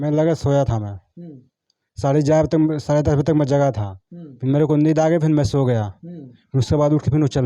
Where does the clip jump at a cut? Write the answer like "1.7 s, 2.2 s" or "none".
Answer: none